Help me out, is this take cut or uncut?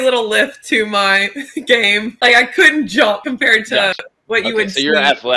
cut